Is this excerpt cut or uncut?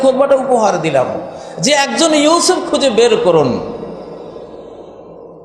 uncut